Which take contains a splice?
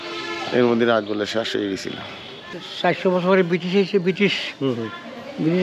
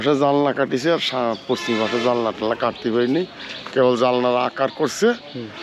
first; 1 cut; at 2.6 s

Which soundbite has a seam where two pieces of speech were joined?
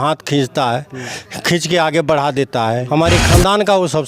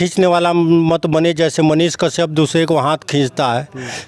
first; 1 cut; at 2.9 s

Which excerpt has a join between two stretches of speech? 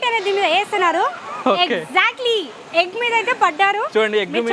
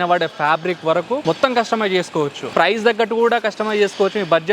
second; 2 cuts; at 1.2 s, 2.5 s

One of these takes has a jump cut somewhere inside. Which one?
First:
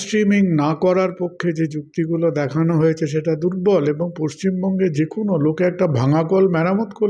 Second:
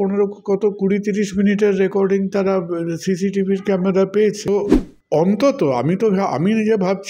second; 1 cut; at 4.5 s

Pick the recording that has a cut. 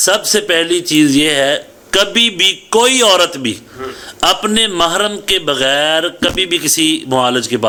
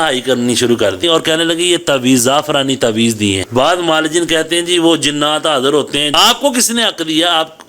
second; 3 cuts; at 1.0 s, 3.4 s, 6.1 s

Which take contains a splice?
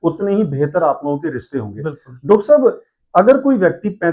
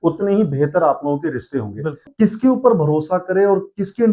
second; 1 cut; at 2.1 s

